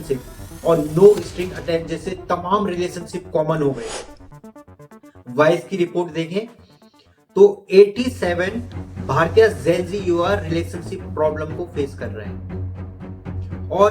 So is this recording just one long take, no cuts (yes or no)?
yes